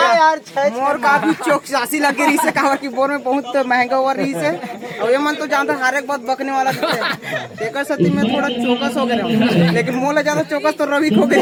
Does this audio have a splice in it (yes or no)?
no